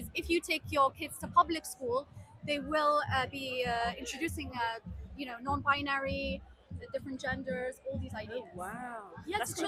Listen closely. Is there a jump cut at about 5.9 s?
no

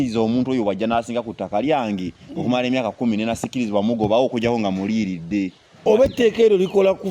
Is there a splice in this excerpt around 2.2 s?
no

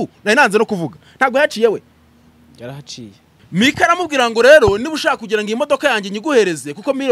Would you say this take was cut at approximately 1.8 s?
no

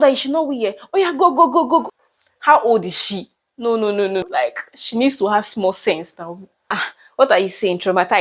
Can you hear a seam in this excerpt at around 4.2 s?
yes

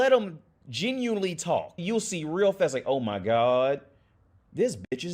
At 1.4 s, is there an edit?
yes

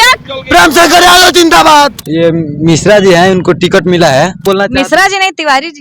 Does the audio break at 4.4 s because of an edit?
yes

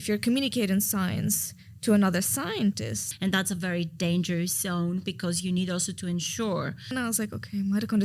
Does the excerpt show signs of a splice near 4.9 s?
no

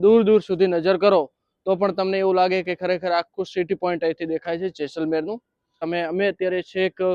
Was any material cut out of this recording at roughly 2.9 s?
no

